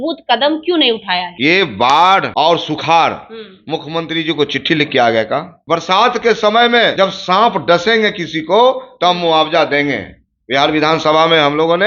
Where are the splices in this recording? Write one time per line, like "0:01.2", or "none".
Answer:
0:01.2
0:02.3
0:05.5
0:06.9